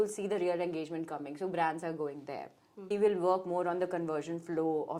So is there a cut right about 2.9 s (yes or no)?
yes